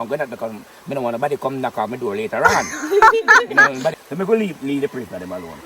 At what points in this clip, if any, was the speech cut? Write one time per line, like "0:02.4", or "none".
0:04.0